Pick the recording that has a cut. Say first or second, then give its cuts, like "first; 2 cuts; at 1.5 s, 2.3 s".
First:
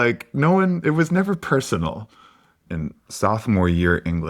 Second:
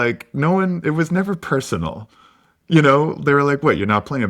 first; 1 cut; at 2.5 s